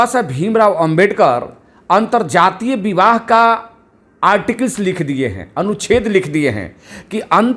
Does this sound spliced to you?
no; 0 cuts

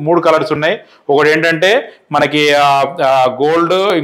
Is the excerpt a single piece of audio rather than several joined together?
yes; 0 cuts

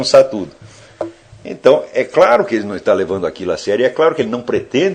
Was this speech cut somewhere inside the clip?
no; 0 cuts

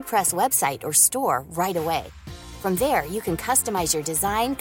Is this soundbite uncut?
yes; 0 cuts

